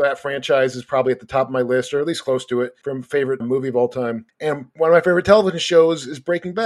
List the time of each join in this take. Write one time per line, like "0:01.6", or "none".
0:03.2
0:04.5